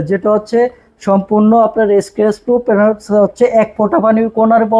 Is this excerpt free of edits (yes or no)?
yes